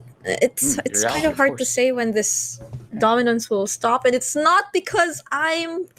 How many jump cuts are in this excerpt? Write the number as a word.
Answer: zero